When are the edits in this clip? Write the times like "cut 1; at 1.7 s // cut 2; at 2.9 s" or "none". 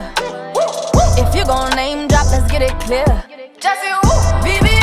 none